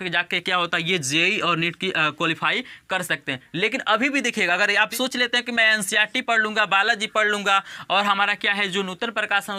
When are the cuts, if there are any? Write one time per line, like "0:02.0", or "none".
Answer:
none